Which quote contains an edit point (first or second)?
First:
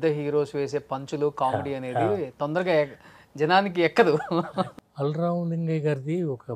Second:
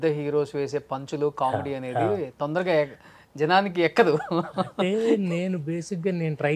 first